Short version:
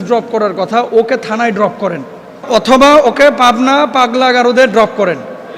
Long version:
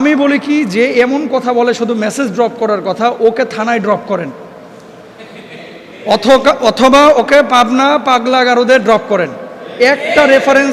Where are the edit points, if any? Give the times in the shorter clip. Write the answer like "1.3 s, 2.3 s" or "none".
2.5 s

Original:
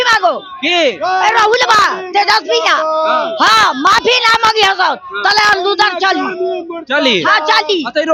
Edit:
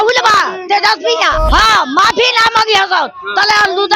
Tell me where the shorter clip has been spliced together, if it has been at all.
1.5 s

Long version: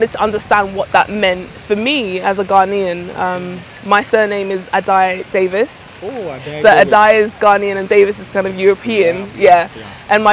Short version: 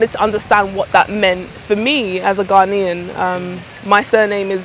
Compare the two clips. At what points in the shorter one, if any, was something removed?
none

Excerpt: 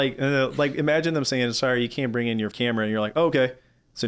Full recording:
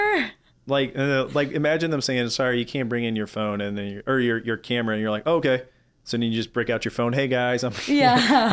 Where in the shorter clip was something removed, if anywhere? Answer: 2.5 s

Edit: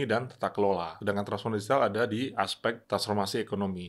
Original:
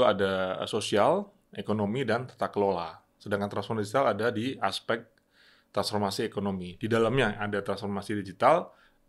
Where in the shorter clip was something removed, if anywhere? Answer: 0.9 s, 2.8 s

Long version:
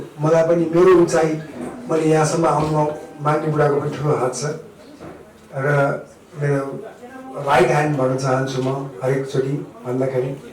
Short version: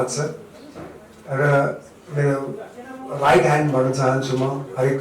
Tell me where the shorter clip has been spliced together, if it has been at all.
none

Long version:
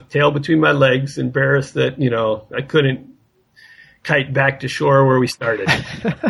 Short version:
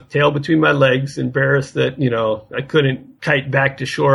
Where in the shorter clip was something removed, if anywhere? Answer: 3.1 s

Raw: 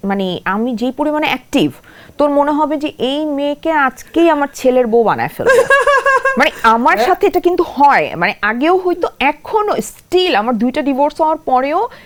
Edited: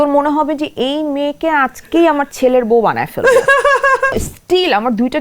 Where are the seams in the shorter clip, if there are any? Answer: 4.1 s

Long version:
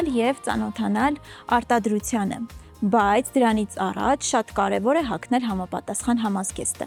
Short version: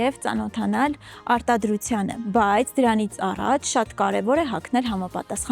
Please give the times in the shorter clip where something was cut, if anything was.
2.2 s

